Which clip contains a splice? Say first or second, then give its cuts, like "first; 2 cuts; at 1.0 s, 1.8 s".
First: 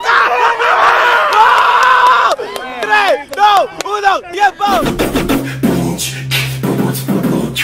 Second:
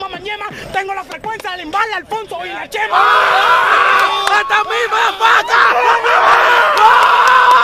first; 1 cut; at 4.8 s